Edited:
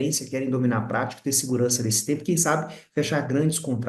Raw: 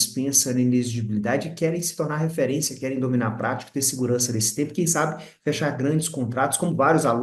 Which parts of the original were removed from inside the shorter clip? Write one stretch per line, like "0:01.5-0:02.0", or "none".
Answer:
none